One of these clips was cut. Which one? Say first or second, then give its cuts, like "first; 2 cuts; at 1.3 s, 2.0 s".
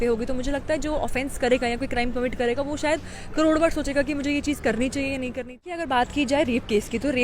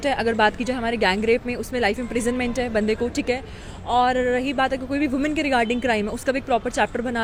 first; 1 cut; at 5.7 s